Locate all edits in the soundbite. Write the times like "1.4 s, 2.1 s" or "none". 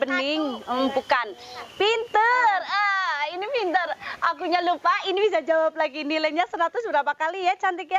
1.6 s